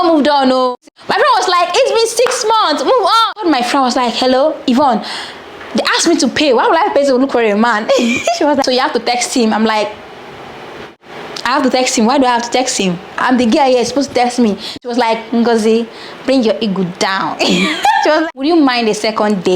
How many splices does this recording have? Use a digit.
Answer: 5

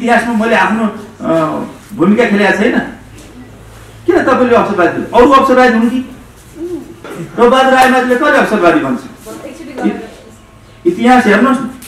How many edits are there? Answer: 1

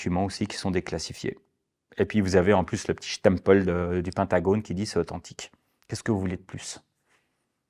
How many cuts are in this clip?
0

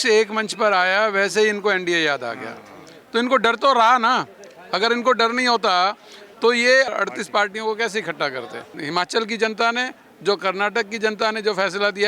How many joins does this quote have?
2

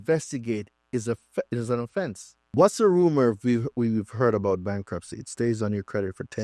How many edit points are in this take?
1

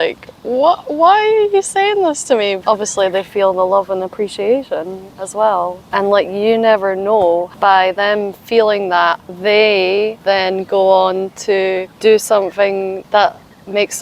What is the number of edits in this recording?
7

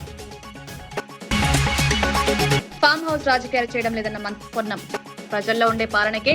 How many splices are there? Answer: 1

